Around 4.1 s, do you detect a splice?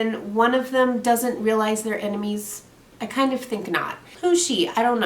yes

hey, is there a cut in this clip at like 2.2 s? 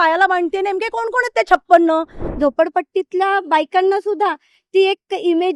yes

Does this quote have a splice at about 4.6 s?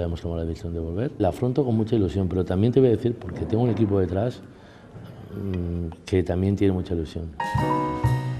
no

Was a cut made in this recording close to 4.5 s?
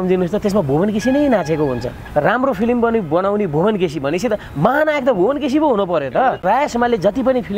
no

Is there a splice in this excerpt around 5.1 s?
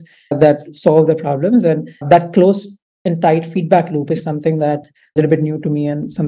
yes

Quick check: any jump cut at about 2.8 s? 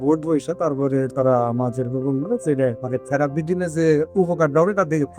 yes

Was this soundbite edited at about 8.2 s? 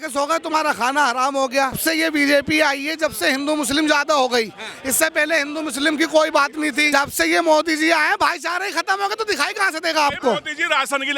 no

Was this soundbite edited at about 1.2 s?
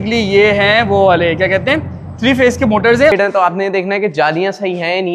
no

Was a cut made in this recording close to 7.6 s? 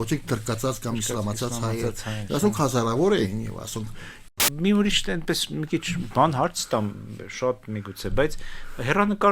no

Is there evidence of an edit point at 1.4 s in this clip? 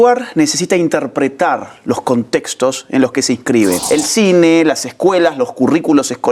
no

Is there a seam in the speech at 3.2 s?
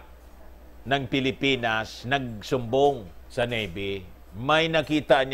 yes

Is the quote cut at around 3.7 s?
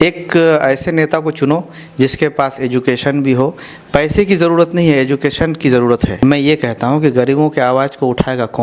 no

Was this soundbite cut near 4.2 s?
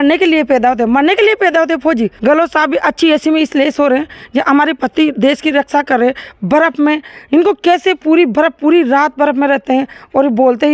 no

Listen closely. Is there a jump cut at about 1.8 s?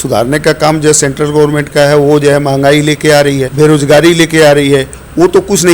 no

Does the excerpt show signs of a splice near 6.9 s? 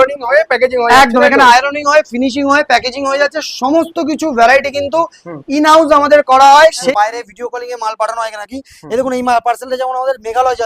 yes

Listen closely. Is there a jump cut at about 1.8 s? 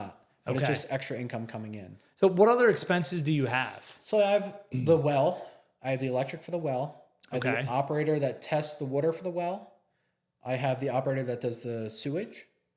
no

